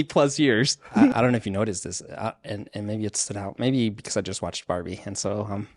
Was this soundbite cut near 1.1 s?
yes; 1 cut; at 1.1 s

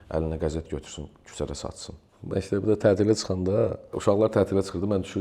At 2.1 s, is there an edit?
yes; 2 cuts; at 2.1 s, 3.9 s

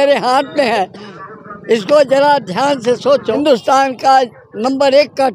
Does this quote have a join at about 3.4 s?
yes; 1 cut; at 3.4 s

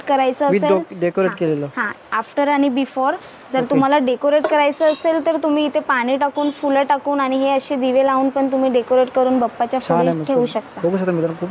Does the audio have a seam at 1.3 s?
no; 0 cuts

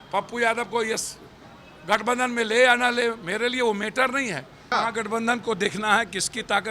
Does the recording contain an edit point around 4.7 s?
yes; 1 cut; at 4.7 s

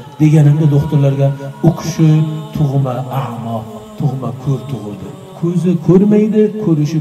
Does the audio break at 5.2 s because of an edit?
yes; 1 cut; at 5.2 s

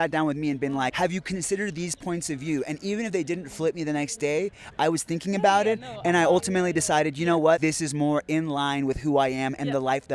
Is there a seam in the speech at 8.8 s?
no; 2 cuts; at 0.9 s, 7.6 s

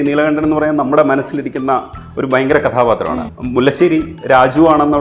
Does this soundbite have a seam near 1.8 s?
no; 1 cut; at 3.3 s

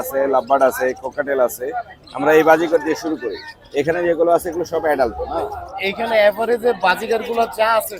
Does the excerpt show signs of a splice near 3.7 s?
no; 0 cuts

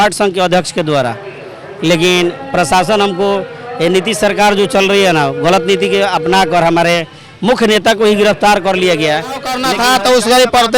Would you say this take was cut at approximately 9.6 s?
yes; 1 cut; at 9.6 s

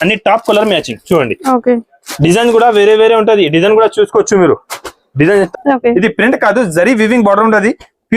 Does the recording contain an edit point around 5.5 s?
yes; 1 cut; at 5.5 s

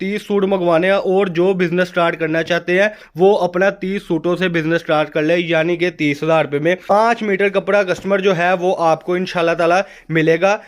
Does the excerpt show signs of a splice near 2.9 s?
no; 1 cut; at 6.9 s

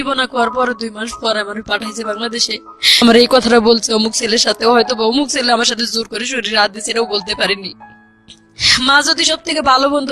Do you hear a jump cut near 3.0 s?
yes; 1 cut; at 3.0 s

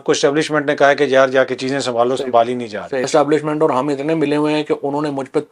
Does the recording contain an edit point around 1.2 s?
no; 1 cut; at 3.1 s

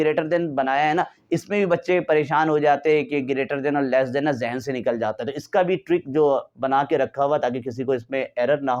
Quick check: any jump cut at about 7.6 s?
no; 0 cuts

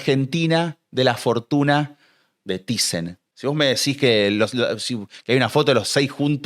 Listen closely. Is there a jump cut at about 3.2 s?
yes; 1 cut; at 3.2 s

